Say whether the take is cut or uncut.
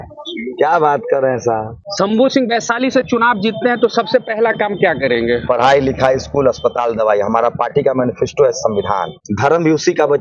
cut